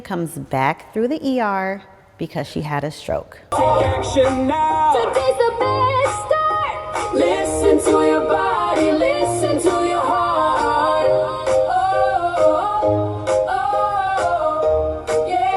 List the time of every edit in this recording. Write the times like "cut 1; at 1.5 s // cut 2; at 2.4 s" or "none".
cut 1; at 3.4 s